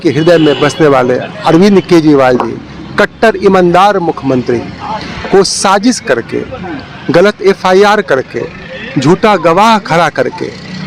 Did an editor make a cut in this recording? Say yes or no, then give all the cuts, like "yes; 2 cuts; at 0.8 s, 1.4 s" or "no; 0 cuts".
no; 0 cuts